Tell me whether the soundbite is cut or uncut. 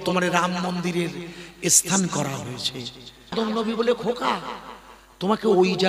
cut